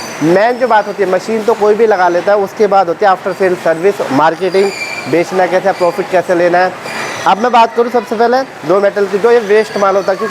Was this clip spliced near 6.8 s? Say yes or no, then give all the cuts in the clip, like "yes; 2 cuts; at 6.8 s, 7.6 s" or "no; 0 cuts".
no; 0 cuts